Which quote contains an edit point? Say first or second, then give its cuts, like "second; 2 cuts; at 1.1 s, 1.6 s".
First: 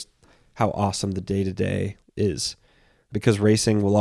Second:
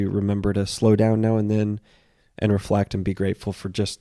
first; 2 cuts; at 2.0 s, 3.1 s